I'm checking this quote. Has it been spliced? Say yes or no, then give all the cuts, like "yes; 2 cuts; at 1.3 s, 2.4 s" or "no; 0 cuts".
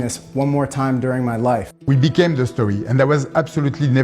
yes; 1 cut; at 1.7 s